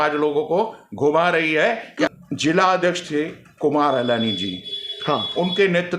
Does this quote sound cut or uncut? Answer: cut